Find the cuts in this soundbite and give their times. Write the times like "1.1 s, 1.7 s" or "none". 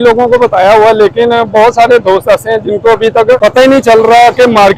none